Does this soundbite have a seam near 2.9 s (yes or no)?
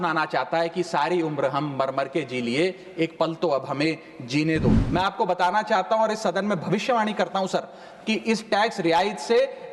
no